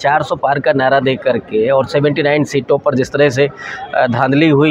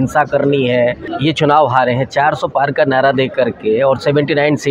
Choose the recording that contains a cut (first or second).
second